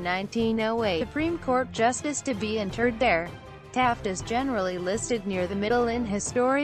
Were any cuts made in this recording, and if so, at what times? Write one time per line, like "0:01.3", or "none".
none